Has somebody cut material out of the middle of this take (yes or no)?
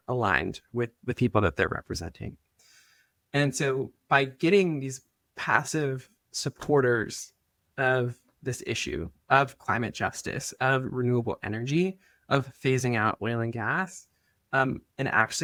no